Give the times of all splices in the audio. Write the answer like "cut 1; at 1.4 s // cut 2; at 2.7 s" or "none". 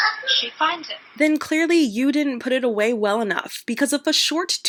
none